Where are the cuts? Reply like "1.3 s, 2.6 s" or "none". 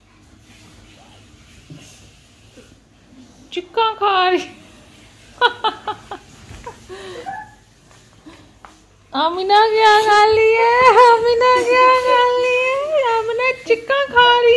none